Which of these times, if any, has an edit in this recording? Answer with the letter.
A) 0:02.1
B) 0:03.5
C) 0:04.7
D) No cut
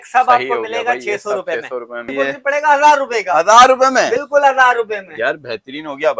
A